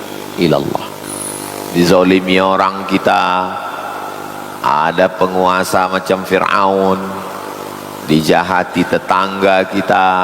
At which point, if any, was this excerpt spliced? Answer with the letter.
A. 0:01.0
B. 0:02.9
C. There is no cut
A